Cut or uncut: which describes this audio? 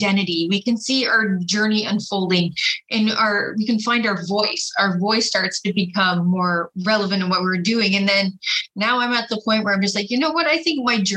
uncut